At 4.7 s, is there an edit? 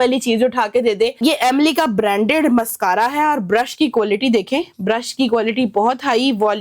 no; 1 cut; at 1.2 s

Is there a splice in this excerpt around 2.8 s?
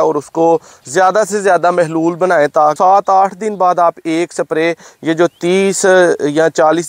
yes; 1 cut; at 2.8 s

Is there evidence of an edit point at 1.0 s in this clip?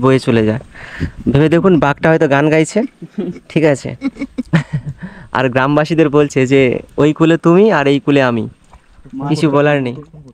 no; 0 cuts

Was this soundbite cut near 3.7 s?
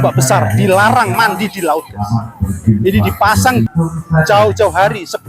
yes; 1 cut; at 3.7 s

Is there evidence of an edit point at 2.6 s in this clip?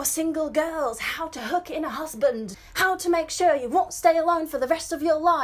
yes; 1 cut; at 2.6 s

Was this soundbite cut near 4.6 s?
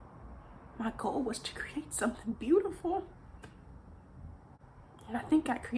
yes; 1 cut; at 4.6 s

